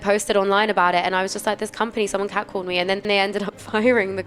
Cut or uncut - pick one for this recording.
cut